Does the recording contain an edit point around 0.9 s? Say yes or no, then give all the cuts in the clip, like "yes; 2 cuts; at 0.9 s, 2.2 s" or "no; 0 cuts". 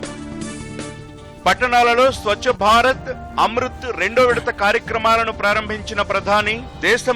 yes; 1 cut; at 0.9 s